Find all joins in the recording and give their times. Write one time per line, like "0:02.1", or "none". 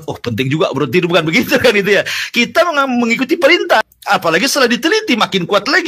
0:03.9